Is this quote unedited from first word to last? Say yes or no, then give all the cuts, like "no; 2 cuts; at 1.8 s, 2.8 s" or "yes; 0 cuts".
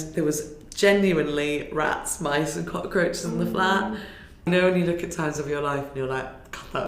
no; 1 cut; at 4.5 s